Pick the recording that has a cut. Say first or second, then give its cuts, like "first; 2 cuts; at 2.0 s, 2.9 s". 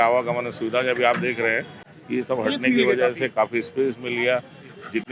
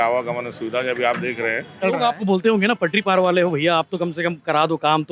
second; 1 cut; at 1.8 s